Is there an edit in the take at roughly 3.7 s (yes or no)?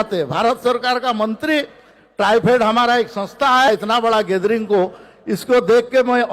yes